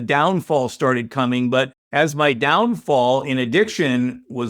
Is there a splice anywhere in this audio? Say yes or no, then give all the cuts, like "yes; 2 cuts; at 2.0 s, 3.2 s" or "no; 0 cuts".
yes; 1 cut; at 1.8 s